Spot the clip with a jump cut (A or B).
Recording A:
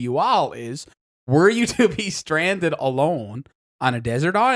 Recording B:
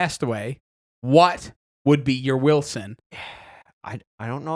B